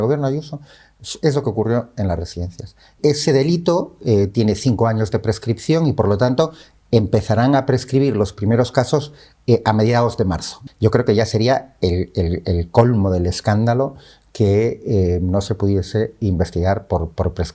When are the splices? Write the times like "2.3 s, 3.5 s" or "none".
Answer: 2.9 s, 10.6 s

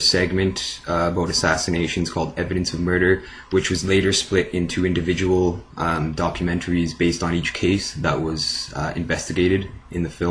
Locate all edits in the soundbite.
2.1 s

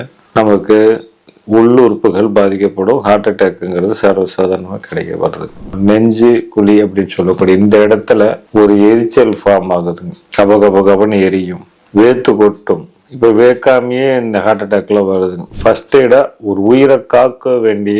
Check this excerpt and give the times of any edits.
5.6 s, 8.4 s, 15.5 s

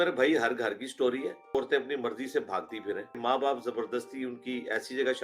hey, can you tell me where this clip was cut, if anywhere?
1.6 s, 3.2 s

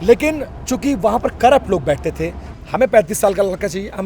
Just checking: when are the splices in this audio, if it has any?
2.4 s

